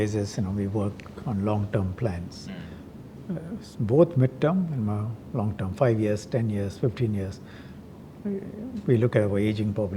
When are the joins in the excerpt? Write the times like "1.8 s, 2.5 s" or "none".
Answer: none